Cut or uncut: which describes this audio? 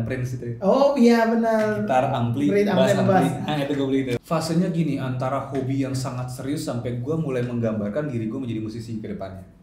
cut